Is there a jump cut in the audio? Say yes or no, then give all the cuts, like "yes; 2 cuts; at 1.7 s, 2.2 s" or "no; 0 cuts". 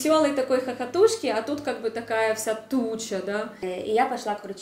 yes; 1 cut; at 3.6 s